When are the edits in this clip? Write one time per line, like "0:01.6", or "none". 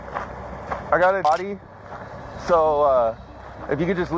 0:01.2